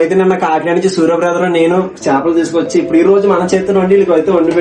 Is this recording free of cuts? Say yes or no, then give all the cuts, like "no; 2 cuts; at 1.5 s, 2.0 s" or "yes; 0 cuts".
yes; 0 cuts